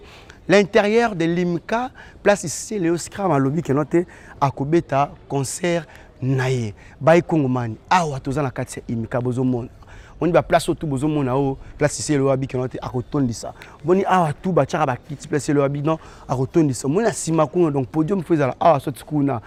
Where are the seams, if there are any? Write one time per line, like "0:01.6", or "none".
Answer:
none